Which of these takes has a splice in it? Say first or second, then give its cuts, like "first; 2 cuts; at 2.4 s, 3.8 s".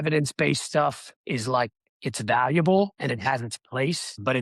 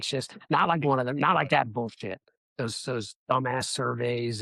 first; 2 cuts; at 1.1 s, 1.9 s